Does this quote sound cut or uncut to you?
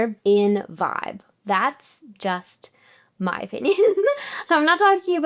cut